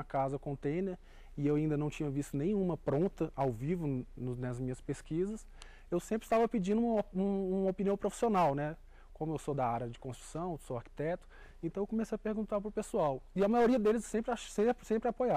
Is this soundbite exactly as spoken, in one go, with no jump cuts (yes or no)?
yes